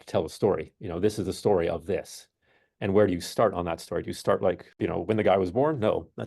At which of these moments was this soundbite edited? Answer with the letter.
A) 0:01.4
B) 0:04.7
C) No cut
B